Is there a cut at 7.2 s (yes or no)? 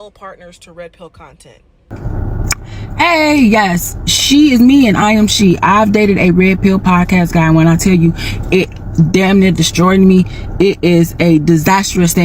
no